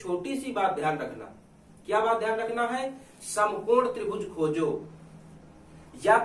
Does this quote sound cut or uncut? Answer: uncut